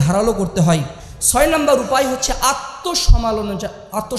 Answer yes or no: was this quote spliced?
no